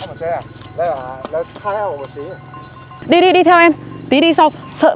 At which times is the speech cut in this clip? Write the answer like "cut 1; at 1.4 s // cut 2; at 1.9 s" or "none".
cut 1; at 3.0 s